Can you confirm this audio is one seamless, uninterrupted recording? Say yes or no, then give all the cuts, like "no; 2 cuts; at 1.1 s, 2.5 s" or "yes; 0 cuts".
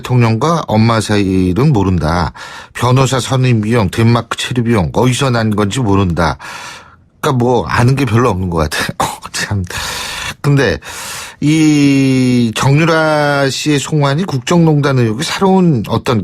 no; 1 cut; at 11.1 s